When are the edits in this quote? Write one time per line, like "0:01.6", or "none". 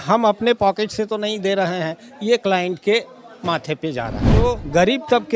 0:04.4